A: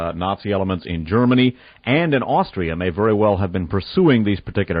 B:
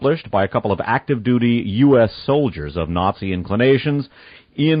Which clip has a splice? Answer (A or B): A